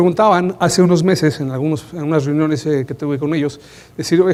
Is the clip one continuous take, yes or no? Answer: yes